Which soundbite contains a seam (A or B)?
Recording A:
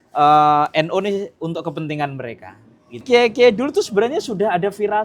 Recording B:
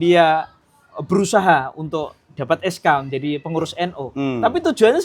A